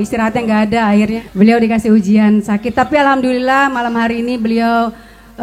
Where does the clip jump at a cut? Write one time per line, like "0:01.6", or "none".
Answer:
0:01.1